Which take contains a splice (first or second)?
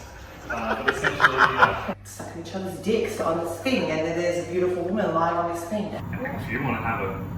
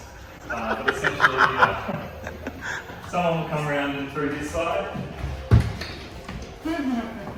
first